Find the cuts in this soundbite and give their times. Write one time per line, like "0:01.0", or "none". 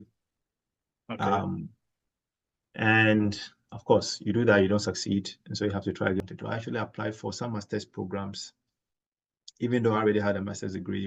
0:06.2